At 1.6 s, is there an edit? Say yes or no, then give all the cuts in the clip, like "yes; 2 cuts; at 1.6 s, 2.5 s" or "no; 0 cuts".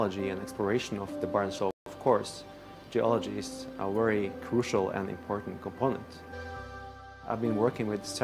yes; 2 cuts; at 1.6 s, 6.3 s